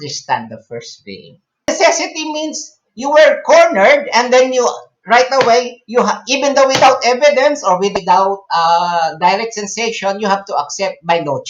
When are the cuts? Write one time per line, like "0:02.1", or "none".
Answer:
0:01.7
0:07.9